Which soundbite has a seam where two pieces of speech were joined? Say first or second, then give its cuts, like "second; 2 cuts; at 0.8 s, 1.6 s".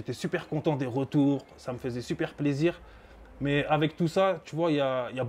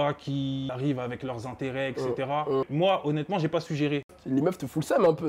second; 3 cuts; at 0.7 s, 2.7 s, 4.1 s